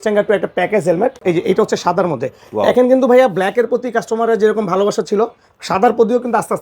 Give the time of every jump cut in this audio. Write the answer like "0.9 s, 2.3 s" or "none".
1.2 s